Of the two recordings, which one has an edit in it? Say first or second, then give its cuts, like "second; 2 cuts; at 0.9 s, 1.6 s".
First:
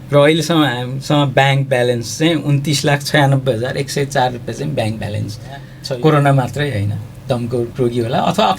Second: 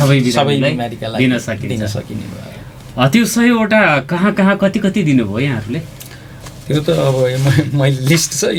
first; 1 cut; at 5.7 s